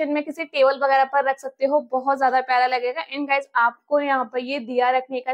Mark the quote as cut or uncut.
uncut